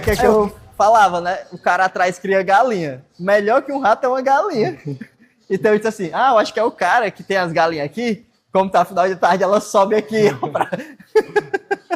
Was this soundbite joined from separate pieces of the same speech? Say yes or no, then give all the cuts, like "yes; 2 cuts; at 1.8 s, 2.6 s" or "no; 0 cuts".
no; 0 cuts